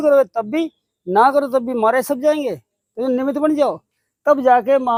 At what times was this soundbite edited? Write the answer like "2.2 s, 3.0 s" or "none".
none

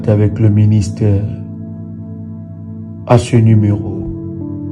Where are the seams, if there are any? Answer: 3.8 s

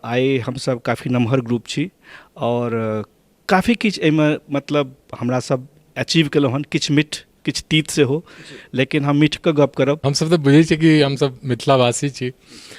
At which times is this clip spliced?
10.1 s

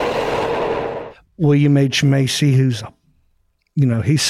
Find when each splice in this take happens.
1.1 s

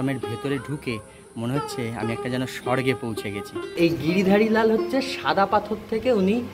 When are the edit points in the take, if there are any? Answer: 3.7 s

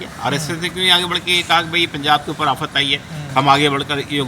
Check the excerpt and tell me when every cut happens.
none

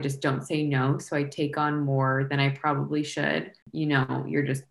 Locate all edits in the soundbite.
3.6 s

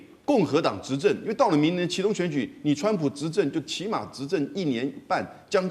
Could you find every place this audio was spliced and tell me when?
none

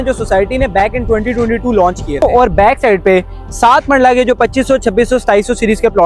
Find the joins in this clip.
2.2 s

